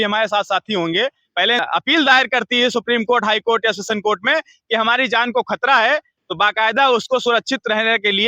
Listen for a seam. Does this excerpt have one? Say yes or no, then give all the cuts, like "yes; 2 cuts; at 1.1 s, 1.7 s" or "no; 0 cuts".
yes; 1 cut; at 1.6 s